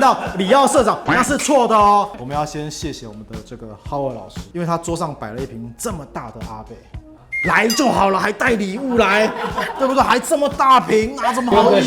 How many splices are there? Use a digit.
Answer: 1